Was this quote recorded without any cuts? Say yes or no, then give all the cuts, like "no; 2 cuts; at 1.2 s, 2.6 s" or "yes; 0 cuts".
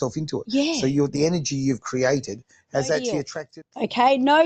no; 1 cut; at 3.4 s